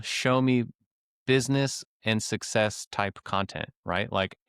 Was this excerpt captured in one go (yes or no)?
yes